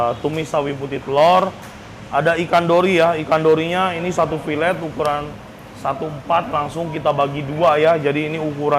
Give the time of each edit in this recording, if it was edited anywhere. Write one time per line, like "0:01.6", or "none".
none